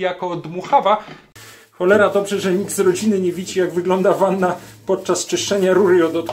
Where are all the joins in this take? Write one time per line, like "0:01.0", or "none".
0:01.2